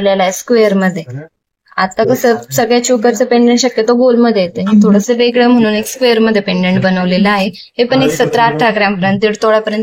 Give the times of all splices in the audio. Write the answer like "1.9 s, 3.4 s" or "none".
none